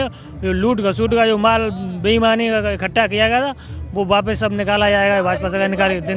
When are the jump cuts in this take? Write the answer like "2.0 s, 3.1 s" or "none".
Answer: none